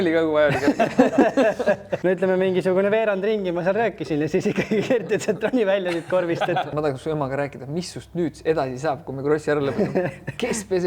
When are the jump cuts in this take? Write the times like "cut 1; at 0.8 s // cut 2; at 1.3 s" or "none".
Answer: cut 1; at 1.9 s // cut 2; at 6.7 s